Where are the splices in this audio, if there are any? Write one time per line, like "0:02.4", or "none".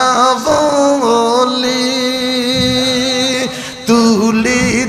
none